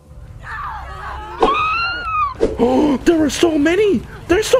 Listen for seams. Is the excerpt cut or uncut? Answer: cut